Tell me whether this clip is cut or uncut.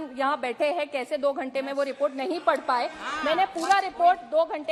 uncut